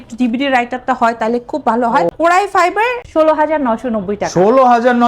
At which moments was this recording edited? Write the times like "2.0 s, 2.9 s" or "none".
2.1 s, 3.0 s